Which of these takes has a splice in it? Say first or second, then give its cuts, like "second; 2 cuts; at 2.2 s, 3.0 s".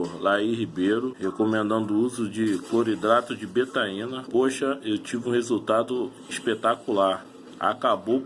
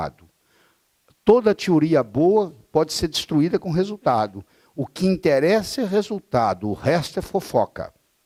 first; 1 cut; at 4.2 s